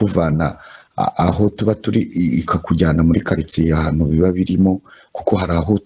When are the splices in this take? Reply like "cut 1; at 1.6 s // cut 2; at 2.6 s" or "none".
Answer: none

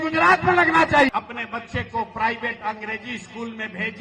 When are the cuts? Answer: cut 1; at 1.1 s

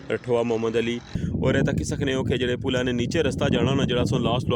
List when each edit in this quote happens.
cut 1; at 1.1 s

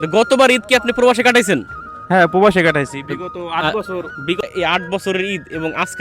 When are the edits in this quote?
cut 1; at 4.4 s

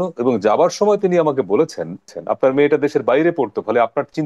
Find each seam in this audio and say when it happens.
cut 1; at 2.2 s

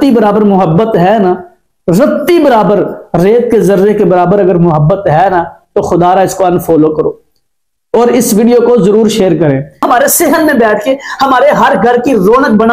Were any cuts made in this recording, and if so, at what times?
cut 1; at 9.8 s

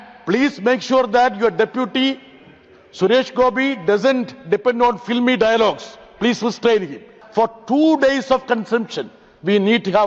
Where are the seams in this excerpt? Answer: cut 1; at 7.1 s

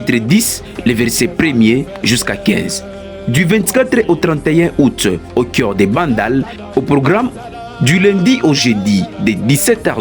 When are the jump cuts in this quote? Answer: cut 1; at 9.0 s

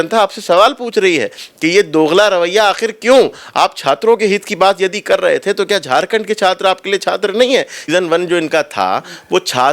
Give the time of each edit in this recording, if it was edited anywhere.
cut 1; at 7.8 s

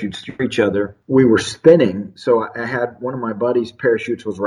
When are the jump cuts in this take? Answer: cut 1; at 1.0 s

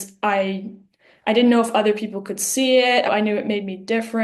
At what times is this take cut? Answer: cut 1; at 3.1 s

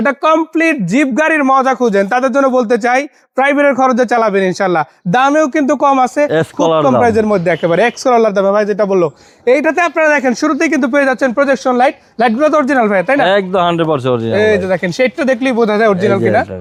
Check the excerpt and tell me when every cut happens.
none

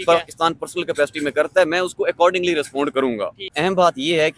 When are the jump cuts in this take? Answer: cut 1; at 3.4 s

